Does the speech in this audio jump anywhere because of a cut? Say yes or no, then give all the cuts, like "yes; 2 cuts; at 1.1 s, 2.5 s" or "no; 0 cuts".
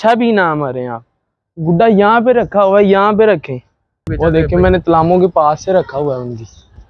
yes; 1 cut; at 3.9 s